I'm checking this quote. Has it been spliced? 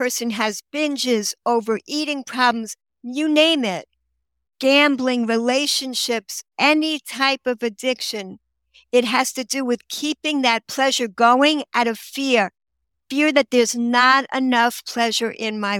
no; 0 cuts

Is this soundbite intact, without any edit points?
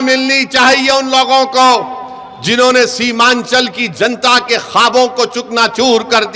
yes; 0 cuts

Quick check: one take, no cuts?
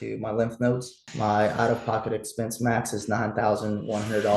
no; 1 cut; at 1.0 s

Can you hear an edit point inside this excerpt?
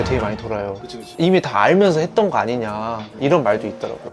yes; 1 cut; at 1.1 s

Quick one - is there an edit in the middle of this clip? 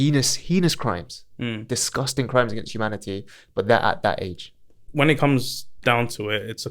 yes; 1 cut; at 4.8 s

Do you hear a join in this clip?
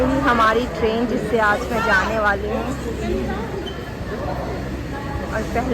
no; 0 cuts

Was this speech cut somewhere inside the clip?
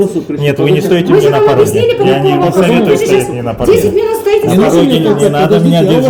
no; 0 cuts

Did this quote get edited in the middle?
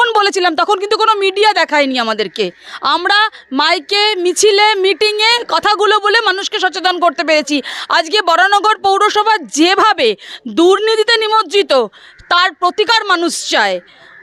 no; 0 cuts

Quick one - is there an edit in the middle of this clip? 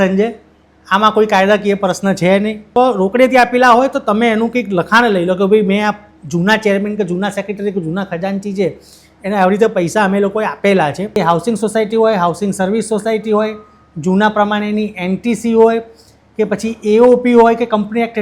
yes; 2 cuts; at 2.6 s, 11.2 s

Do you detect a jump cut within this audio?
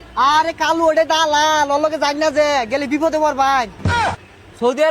yes; 1 cut; at 3.9 s

